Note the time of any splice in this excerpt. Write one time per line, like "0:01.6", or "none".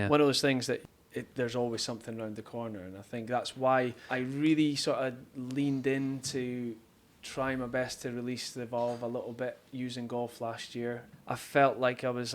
0:04.0
0:11.1